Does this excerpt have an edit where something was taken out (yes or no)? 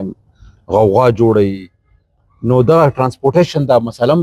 no